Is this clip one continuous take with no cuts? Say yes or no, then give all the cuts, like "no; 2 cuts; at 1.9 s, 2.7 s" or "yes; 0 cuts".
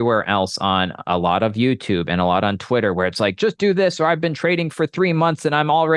yes; 0 cuts